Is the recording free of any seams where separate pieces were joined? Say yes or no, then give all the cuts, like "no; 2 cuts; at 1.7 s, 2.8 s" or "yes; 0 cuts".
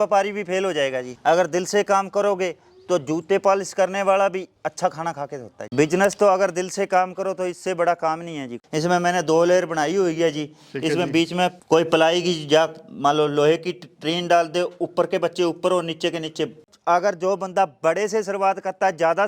no; 3 cuts; at 5.6 s, 8.6 s, 16.7 s